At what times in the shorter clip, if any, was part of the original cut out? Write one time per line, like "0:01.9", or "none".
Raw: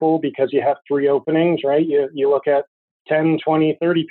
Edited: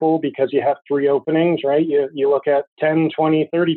0:02.7